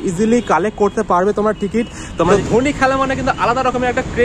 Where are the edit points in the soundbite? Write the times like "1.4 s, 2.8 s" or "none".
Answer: 2.1 s

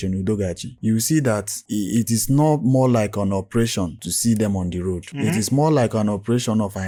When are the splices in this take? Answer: none

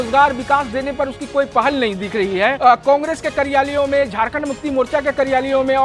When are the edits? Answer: 2.6 s

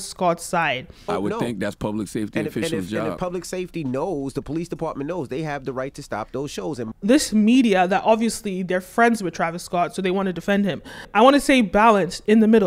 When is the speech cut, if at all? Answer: 0.9 s, 6.9 s, 11.0 s

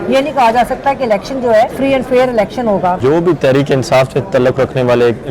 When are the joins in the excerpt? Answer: 1.7 s, 3.0 s

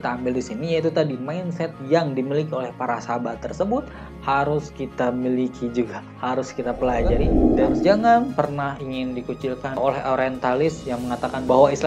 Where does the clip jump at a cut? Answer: 7.4 s

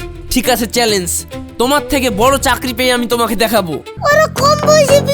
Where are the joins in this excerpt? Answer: 3.9 s

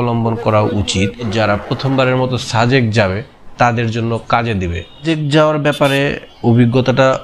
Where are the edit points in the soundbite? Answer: 1.3 s, 5.0 s

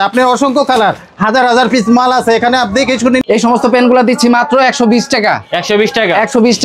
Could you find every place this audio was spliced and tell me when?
3.2 s

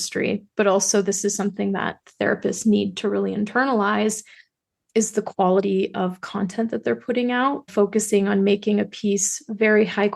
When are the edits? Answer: 7.7 s

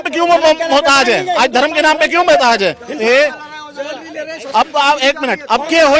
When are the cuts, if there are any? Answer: 3.0 s

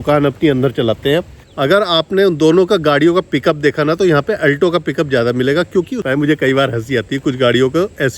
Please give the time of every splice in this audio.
1.4 s, 6.0 s

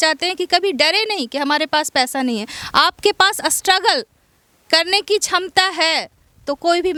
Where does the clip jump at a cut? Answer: none

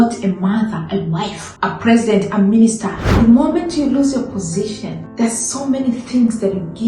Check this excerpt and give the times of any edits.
1.4 s, 3.1 s, 5.0 s

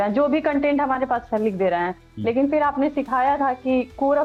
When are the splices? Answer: none

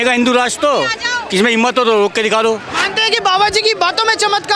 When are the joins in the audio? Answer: 2.7 s

